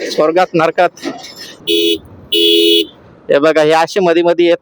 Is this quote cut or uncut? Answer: cut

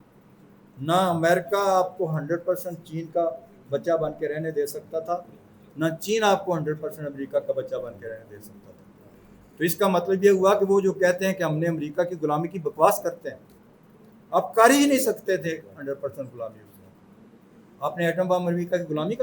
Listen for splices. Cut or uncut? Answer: cut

